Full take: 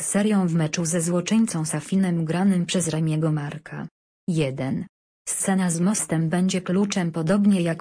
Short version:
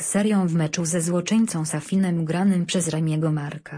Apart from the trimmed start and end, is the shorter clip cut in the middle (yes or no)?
no